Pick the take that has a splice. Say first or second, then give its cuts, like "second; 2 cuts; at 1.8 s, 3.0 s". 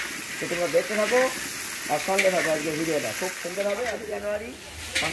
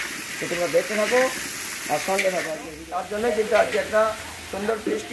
second; 1 cut; at 2.8 s